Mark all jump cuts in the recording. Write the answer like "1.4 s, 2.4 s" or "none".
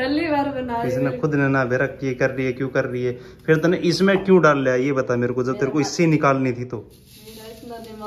none

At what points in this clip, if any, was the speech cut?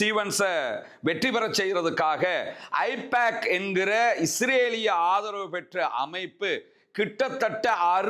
none

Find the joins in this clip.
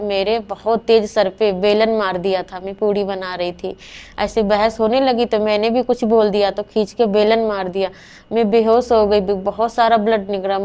none

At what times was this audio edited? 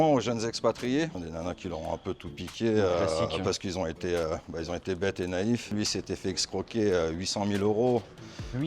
1.2 s, 5.7 s

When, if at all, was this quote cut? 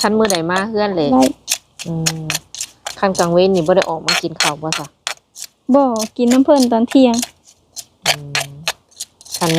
1.1 s

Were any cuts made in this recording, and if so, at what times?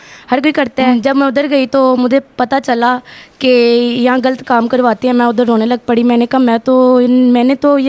0.9 s

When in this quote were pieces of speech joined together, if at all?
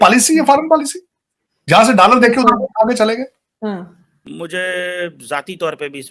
4.2 s

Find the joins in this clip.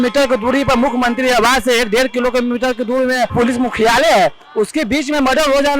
3.3 s

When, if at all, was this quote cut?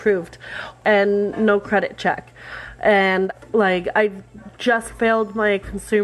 0.8 s, 3.3 s

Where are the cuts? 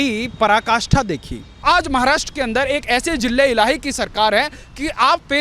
1.6 s

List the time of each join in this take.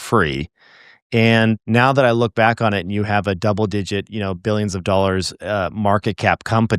1.6 s

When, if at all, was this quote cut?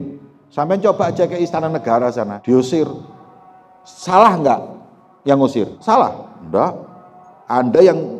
2.4 s, 5.8 s

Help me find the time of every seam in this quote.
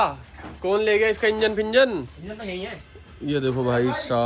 none

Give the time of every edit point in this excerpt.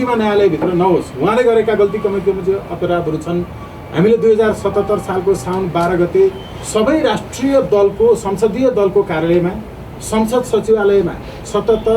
none

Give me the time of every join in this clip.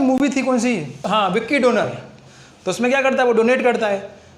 0.9 s

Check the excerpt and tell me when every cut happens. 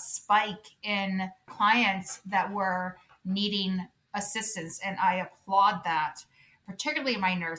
1.4 s, 6.6 s

